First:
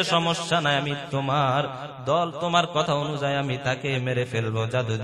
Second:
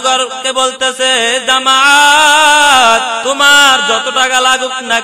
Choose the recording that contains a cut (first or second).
second